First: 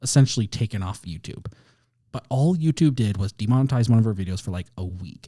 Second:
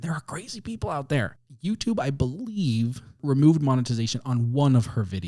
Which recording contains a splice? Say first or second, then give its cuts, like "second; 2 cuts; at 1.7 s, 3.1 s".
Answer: second; 2 cuts; at 1.3 s, 3.2 s